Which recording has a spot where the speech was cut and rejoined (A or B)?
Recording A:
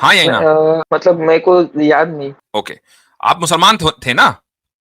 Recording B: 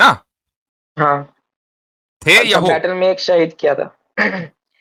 A